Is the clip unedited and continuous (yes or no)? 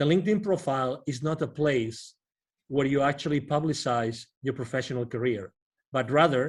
yes